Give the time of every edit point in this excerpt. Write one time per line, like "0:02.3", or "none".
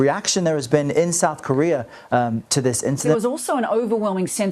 0:03.1